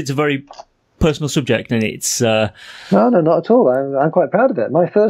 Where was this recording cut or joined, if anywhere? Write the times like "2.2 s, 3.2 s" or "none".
none